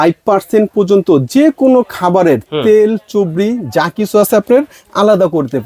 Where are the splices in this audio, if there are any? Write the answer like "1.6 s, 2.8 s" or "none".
none